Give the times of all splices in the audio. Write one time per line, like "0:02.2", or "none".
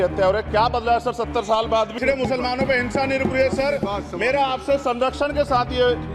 0:01.9